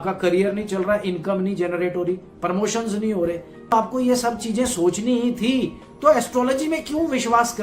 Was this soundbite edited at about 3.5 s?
yes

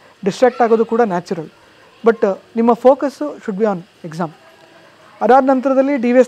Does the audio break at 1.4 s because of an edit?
no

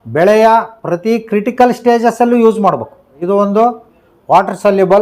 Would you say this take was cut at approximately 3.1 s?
yes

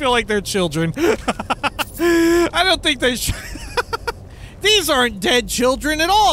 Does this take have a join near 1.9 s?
no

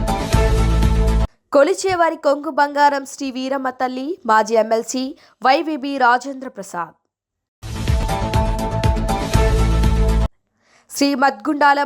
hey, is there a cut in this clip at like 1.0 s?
yes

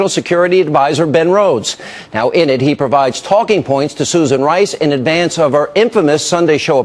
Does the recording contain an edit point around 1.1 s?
yes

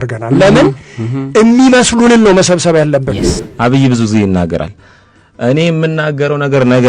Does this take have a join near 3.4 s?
yes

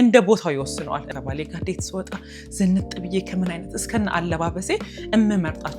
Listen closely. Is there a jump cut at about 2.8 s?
no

